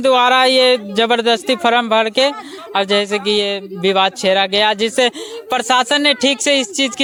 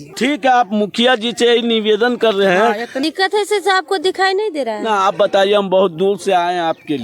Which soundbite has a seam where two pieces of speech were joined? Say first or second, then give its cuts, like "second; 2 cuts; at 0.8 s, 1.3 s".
second; 1 cut; at 2.9 s